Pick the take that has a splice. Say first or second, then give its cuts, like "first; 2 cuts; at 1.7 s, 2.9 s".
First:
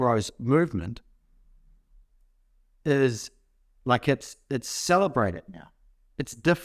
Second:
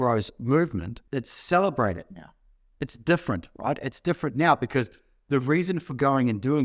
second; 1 cut; at 1.0 s